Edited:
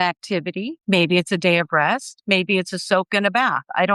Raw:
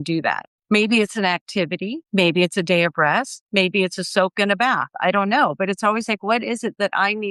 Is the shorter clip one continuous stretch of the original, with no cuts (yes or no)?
yes